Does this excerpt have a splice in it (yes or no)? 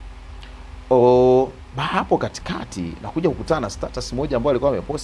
no